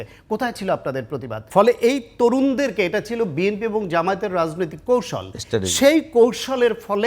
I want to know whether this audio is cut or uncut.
cut